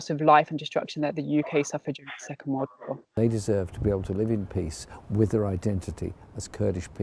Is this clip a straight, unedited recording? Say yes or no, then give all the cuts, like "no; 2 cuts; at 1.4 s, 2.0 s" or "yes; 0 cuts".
no; 1 cut; at 3.2 s